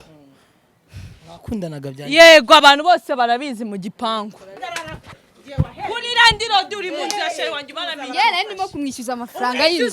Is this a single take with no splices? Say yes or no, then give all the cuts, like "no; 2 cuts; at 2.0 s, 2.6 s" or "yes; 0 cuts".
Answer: no; 1 cut; at 4.5 s